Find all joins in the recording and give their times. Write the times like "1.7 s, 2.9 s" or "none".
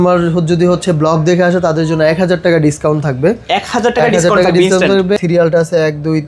5.2 s